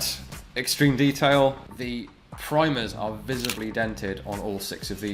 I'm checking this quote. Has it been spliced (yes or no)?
yes